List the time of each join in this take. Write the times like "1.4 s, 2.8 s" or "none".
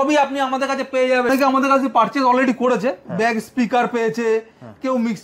1.3 s

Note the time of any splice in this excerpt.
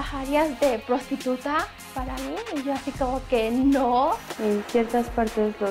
4.3 s

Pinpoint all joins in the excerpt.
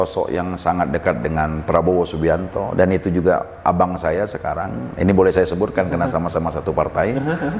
none

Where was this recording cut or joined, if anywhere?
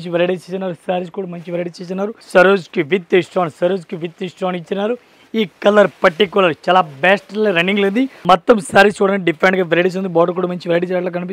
2.2 s, 8.1 s

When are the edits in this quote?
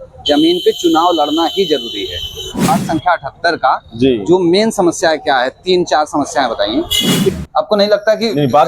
2.7 s, 7.3 s

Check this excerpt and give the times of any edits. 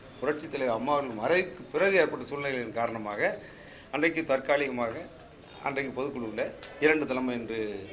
none

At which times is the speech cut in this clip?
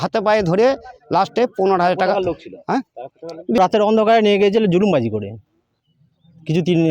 3.6 s

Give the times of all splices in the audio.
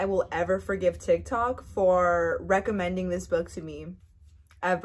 none

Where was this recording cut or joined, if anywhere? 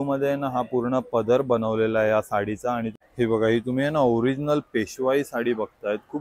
3.0 s

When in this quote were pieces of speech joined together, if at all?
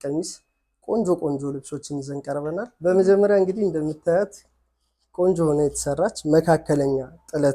2.7 s

